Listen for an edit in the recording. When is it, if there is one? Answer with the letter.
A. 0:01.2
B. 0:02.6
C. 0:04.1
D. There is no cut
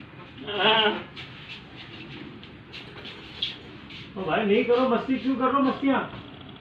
D